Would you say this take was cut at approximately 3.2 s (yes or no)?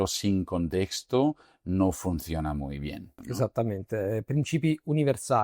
yes